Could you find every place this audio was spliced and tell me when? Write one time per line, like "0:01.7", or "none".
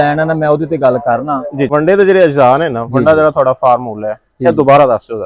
0:01.7